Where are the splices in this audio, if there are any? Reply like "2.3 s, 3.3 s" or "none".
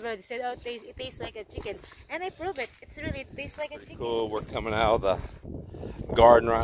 4.0 s